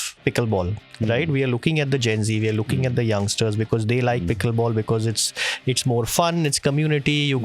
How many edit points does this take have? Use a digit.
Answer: 0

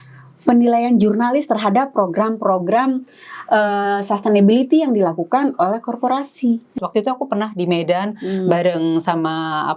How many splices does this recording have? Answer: 1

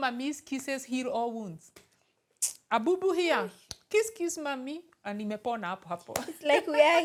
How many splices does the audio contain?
0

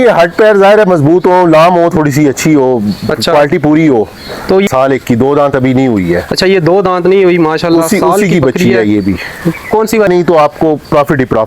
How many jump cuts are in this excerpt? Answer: 2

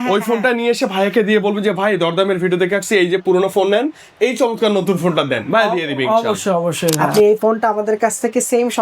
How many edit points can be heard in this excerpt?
1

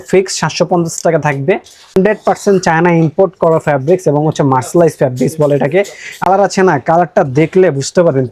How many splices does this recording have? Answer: 2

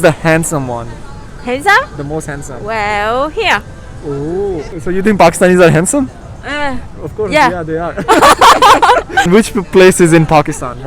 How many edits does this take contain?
2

